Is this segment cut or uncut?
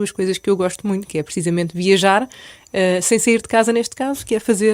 uncut